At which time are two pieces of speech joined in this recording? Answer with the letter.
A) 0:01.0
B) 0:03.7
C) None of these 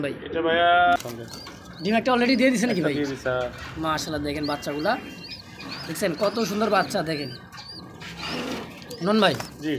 A